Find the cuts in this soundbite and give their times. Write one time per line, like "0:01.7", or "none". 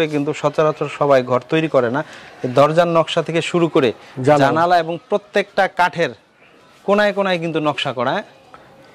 none